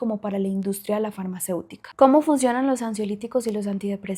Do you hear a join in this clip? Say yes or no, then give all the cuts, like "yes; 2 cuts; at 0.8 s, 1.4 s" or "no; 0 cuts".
no; 0 cuts